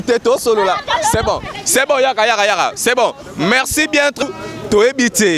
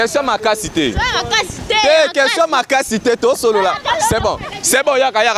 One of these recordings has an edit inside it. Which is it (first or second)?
first